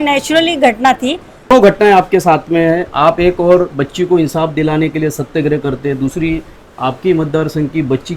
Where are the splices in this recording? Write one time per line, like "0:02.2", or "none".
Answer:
0:01.5